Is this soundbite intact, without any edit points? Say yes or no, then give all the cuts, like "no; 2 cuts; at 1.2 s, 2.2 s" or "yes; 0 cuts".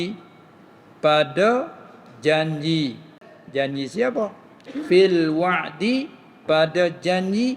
no; 1 cut; at 3.3 s